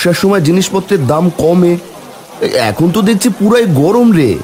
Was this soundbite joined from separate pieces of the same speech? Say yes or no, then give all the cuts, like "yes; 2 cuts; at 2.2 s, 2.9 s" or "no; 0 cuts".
no; 0 cuts